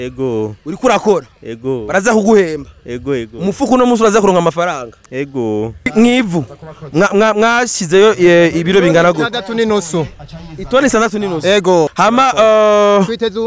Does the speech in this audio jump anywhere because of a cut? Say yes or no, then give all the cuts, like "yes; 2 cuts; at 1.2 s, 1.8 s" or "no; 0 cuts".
yes; 2 cuts; at 5.9 s, 11.9 s